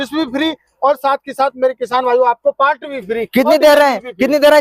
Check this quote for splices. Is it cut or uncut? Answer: uncut